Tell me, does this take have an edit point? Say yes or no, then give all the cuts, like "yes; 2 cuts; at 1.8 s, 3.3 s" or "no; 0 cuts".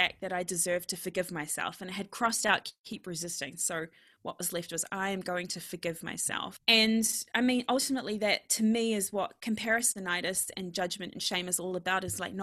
yes; 1 cut; at 6.6 s